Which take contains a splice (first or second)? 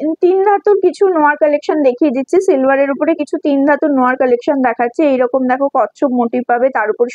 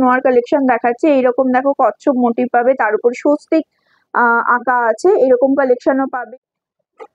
second